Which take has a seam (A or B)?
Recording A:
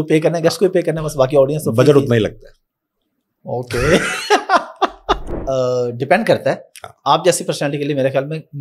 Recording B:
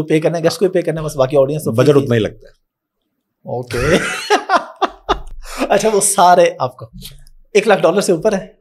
A